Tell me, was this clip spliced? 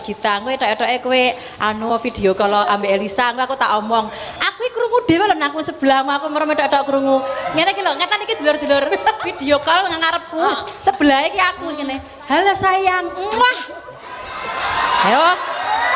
no; 0 cuts

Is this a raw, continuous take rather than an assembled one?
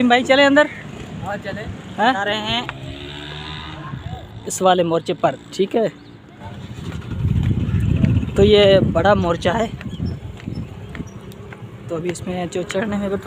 no; 2 cuts; at 2.2 s, 6.4 s

